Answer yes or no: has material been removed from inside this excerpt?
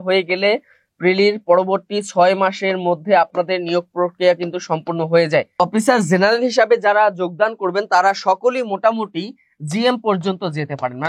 yes